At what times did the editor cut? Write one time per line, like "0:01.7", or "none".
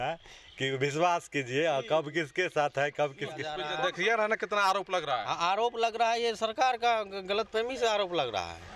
0:03.6